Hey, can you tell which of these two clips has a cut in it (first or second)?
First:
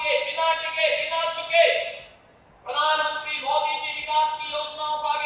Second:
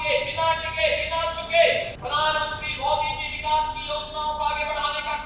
second